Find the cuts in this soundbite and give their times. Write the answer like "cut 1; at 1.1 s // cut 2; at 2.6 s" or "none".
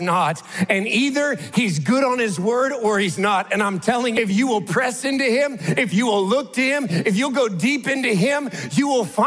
cut 1; at 4.2 s